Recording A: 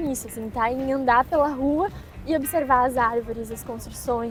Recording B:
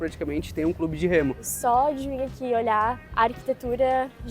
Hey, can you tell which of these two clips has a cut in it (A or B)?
B